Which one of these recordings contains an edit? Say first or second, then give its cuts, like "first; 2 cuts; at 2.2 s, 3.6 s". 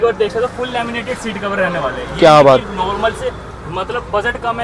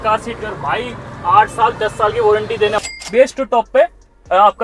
second; 1 cut; at 2.8 s